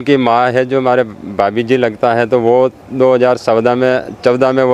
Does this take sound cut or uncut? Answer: uncut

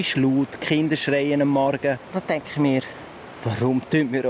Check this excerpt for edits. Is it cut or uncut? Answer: cut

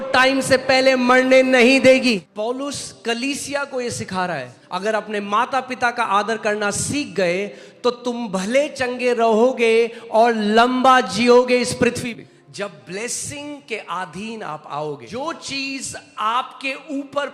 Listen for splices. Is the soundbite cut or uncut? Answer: cut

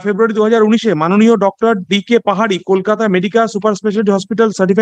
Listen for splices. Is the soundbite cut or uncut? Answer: uncut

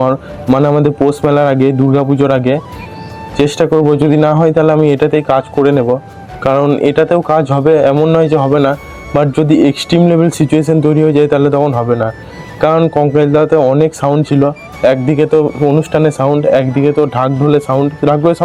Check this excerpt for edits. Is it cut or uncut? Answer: uncut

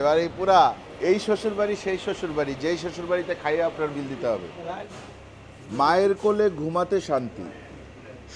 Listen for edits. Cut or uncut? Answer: cut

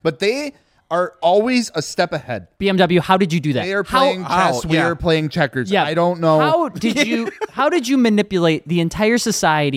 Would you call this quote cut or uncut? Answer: uncut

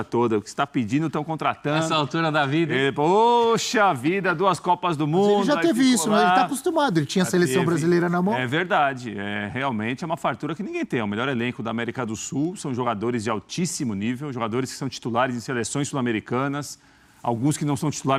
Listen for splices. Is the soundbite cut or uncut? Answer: uncut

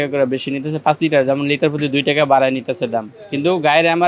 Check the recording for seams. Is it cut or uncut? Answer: uncut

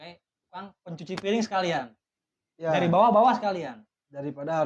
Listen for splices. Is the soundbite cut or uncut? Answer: uncut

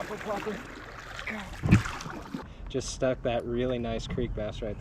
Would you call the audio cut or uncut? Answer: cut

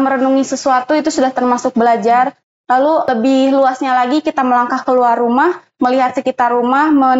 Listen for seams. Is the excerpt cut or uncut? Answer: cut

